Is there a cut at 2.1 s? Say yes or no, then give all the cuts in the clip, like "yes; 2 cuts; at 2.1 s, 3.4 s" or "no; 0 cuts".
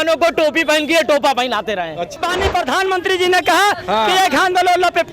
yes; 1 cut; at 2.1 s